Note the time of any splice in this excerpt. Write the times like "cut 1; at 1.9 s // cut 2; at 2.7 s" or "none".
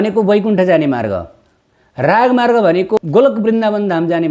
cut 1; at 3.0 s